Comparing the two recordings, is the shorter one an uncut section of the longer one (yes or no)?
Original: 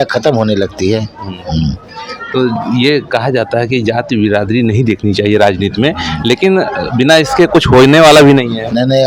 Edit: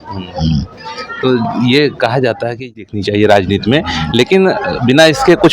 no